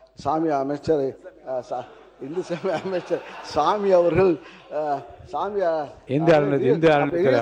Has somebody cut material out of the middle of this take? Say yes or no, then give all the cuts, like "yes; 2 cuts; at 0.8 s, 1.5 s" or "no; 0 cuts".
no; 0 cuts